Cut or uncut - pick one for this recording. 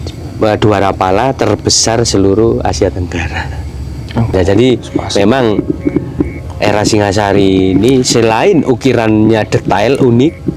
cut